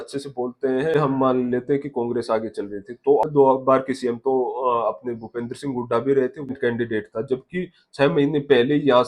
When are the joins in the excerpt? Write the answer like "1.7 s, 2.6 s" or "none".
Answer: 0.9 s, 3.2 s, 6.5 s